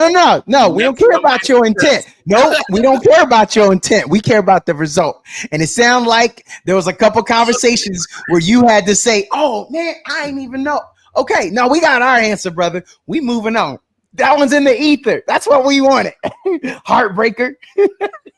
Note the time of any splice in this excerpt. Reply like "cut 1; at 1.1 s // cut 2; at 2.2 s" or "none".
none